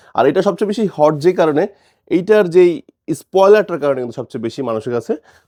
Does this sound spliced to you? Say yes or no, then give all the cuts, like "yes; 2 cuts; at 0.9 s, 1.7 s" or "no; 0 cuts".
no; 0 cuts